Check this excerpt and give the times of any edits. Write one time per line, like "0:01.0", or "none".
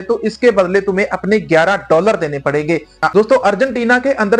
0:03.1